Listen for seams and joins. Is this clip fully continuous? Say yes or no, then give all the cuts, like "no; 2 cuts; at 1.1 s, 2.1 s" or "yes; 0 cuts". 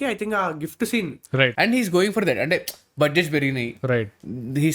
no; 1 cut; at 1.5 s